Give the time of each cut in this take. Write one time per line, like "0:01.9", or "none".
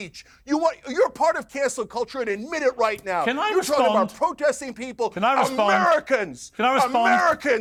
none